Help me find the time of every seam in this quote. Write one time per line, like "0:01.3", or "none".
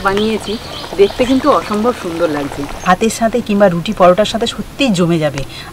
0:02.8